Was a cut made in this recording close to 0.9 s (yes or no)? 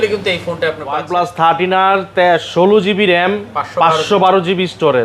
yes